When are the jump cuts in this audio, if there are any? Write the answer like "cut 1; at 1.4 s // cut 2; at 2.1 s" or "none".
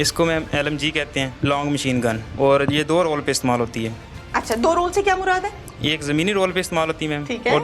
cut 1; at 1.3 s